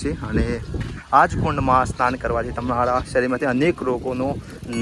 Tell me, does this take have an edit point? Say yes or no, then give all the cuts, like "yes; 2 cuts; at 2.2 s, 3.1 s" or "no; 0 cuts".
no; 0 cuts